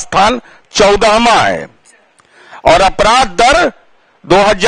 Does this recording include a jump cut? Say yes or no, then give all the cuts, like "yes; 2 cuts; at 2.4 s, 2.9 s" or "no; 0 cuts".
no; 0 cuts